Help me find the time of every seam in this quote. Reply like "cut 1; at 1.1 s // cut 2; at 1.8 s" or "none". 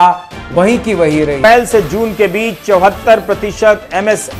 cut 1; at 1.4 s